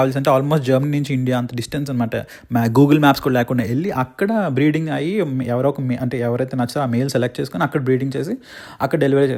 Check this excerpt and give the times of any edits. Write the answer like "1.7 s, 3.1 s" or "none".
none